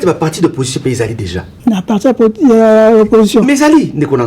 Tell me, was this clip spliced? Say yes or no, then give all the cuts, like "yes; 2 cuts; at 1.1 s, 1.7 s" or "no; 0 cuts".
yes; 1 cut; at 1.4 s